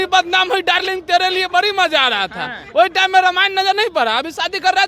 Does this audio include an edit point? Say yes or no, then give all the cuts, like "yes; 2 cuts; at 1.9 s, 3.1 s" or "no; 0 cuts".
no; 0 cuts